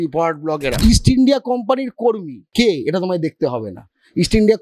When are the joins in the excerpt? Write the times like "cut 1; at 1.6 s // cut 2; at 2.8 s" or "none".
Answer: cut 1; at 0.8 s // cut 2; at 2.4 s